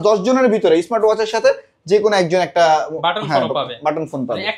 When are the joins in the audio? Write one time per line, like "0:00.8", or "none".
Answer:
none